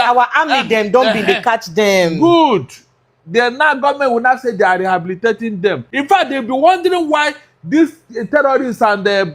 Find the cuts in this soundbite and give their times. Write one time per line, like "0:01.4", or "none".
0:05.9